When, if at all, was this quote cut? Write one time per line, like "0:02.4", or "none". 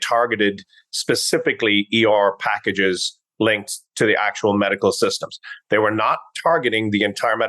none